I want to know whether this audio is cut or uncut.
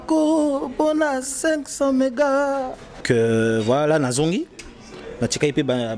cut